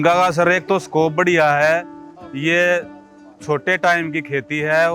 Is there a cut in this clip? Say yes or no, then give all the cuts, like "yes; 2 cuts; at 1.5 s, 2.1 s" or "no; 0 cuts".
no; 0 cuts